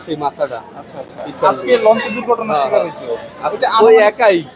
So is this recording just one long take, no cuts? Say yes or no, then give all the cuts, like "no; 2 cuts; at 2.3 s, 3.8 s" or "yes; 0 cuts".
yes; 0 cuts